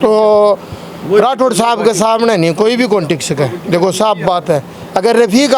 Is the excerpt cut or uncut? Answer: uncut